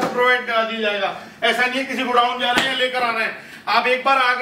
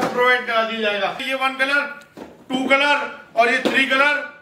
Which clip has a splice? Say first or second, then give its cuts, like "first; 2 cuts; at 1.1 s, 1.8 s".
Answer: second; 1 cut; at 1.2 s